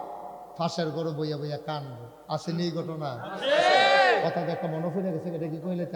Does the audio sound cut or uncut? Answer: uncut